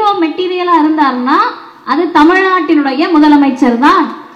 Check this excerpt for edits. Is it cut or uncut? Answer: uncut